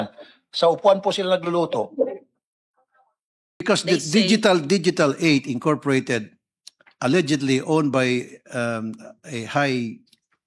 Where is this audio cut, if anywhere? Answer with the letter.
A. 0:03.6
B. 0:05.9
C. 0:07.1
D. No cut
A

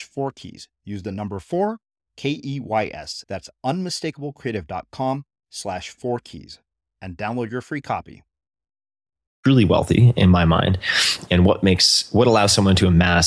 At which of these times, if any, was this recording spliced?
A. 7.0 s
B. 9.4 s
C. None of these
B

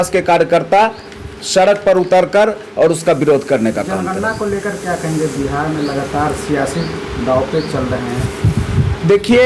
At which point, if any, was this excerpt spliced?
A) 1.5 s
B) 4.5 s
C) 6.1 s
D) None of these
D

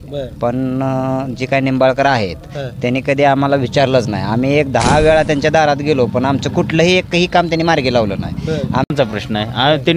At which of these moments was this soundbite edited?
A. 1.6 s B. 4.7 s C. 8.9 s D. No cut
C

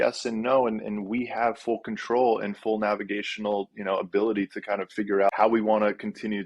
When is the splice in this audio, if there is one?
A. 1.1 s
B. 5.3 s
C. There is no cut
B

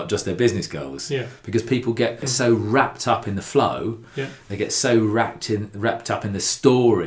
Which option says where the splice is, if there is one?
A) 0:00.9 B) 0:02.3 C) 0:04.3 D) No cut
B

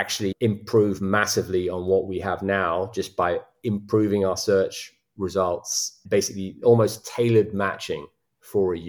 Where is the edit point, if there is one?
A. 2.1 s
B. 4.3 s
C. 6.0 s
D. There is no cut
C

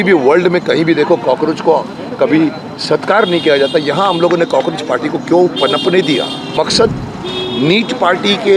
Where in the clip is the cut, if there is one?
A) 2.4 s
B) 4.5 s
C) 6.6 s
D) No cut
C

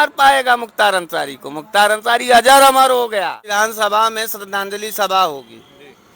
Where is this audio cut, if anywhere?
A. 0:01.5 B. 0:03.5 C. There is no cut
B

